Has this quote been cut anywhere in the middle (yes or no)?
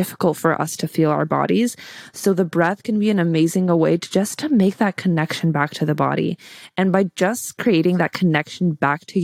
no